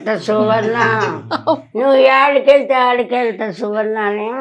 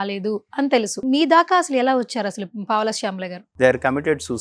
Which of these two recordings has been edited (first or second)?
second